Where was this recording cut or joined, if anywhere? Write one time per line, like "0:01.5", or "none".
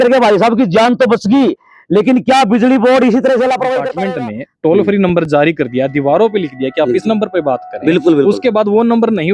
0:03.9